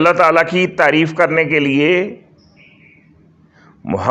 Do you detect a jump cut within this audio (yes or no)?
no